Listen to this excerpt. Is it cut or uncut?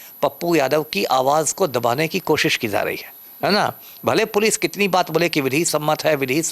uncut